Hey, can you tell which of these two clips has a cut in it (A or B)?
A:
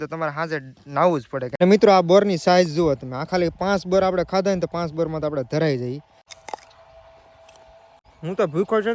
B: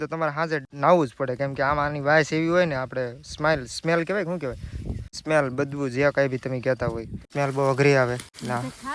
A